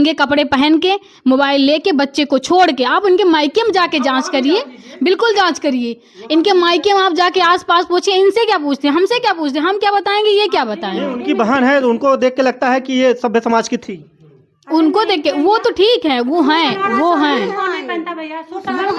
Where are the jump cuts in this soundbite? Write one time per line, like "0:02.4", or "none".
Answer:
none

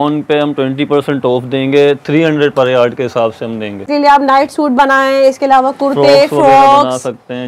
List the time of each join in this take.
0:03.9

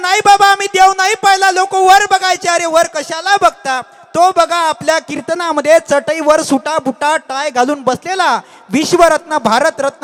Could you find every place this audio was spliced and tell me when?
none

